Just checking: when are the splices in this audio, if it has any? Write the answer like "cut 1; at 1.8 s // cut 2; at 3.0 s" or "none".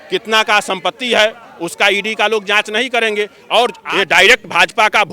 cut 1; at 3.8 s